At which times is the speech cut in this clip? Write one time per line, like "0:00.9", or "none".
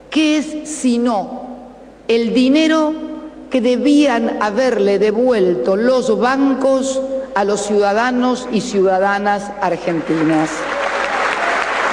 none